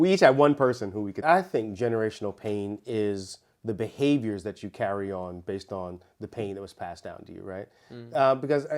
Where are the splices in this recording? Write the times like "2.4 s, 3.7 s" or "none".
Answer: 1.2 s